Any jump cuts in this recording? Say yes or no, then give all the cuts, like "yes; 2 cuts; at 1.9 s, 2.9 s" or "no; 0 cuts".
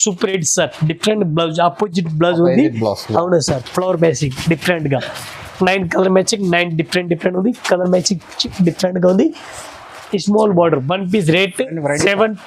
no; 0 cuts